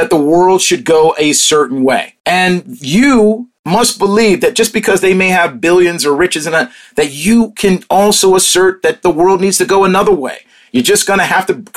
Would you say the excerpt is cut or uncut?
cut